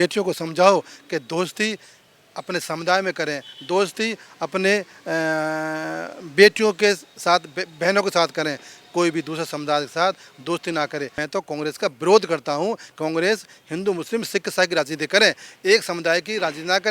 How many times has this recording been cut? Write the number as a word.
one